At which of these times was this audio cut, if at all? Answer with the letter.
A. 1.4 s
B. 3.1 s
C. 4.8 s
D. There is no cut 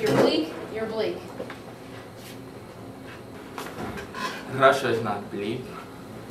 B